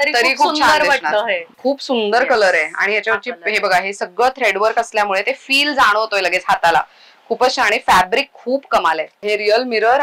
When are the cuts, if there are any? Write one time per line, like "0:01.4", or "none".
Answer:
0:01.6
0:09.3